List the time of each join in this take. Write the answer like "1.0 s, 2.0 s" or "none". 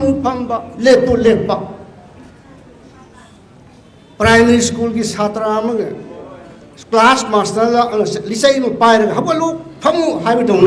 none